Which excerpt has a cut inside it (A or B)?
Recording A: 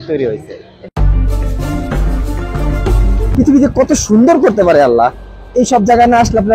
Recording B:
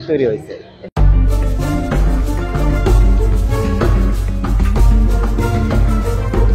A